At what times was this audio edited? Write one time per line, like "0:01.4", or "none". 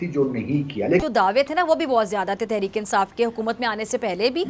0:01.0